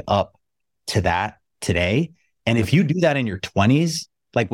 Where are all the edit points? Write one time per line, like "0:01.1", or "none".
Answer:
none